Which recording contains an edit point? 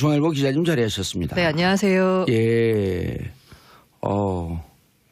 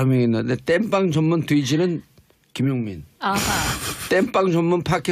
first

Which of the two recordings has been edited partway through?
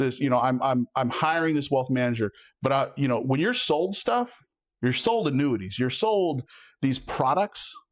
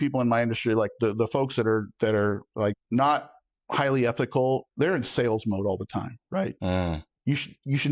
second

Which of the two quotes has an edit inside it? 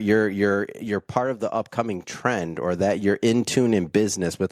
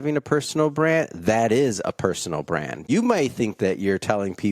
second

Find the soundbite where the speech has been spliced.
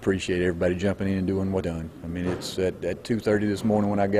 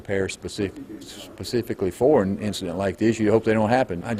first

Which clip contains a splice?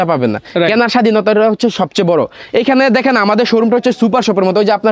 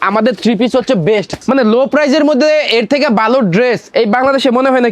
second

